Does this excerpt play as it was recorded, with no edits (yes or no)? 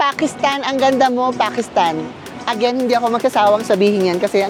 yes